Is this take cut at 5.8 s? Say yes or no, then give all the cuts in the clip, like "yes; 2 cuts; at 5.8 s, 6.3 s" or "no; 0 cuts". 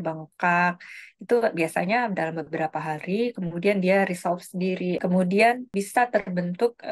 yes; 2 cuts; at 5.0 s, 5.8 s